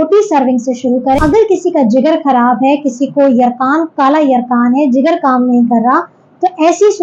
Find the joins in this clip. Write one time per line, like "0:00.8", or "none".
0:01.2